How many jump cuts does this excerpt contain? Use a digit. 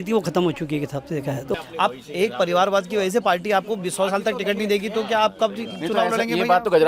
1